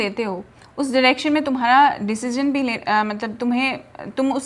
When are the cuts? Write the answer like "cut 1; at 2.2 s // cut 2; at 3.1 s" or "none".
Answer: none